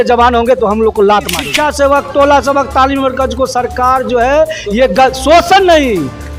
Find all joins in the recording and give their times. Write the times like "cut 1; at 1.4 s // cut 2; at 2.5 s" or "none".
cut 1; at 1.4 s